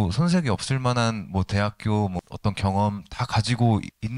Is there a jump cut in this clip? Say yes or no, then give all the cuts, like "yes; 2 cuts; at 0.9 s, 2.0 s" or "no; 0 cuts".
no; 0 cuts